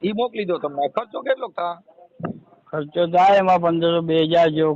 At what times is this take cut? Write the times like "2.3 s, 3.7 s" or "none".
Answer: none